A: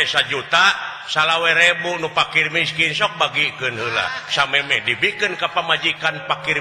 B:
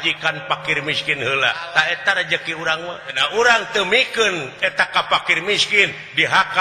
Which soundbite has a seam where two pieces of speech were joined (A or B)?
B